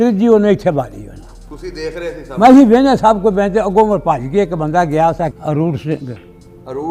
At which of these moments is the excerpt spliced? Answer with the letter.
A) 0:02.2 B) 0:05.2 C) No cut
B